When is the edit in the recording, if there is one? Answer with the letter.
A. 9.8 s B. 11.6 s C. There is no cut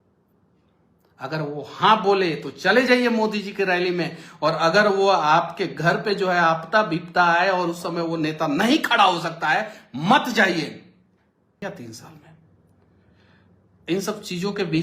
B